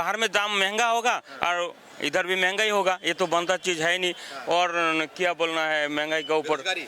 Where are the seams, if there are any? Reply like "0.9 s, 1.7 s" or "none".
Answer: none